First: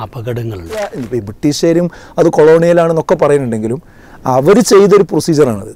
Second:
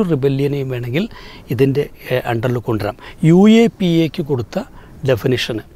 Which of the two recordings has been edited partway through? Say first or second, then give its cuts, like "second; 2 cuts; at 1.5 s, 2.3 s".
first; 1 cut; at 1.0 s